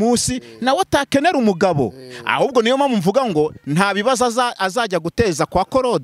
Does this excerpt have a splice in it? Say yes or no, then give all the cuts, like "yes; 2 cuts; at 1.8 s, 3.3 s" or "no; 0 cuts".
no; 0 cuts